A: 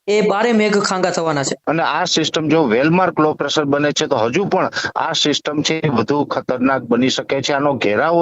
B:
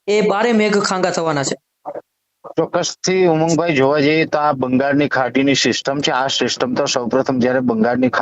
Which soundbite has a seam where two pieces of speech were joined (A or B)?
A